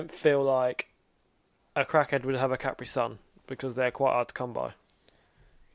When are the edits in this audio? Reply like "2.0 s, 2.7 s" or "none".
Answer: none